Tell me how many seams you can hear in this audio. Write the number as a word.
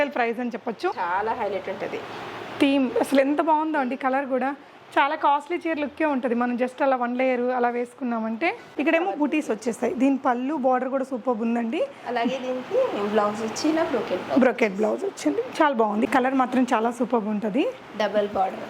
three